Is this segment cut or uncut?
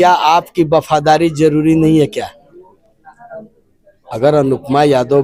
uncut